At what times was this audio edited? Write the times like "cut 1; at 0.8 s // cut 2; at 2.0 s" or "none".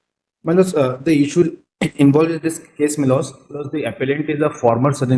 none